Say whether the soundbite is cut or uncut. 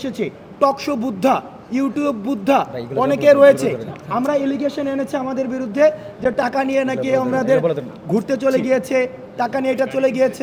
uncut